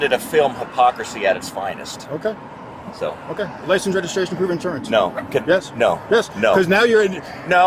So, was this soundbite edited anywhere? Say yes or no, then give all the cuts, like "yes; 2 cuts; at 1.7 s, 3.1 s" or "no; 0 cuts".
yes; 1 cut; at 2.5 s